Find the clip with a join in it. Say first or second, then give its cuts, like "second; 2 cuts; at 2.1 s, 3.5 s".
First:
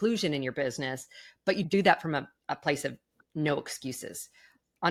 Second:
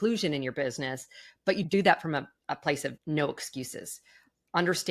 second; 1 cut; at 3.0 s